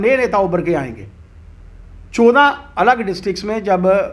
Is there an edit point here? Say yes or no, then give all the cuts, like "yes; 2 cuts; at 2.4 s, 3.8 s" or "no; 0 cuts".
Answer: no; 0 cuts